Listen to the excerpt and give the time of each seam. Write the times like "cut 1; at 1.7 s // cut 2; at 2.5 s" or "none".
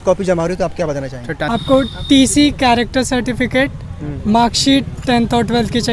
cut 1; at 1.4 s